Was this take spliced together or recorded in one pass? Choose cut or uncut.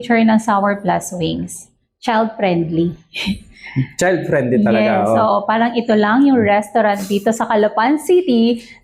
uncut